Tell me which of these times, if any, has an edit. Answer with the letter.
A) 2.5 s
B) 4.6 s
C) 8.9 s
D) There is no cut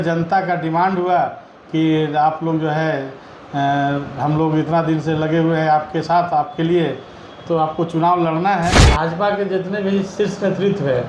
C